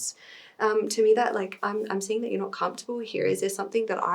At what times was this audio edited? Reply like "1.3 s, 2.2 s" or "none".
none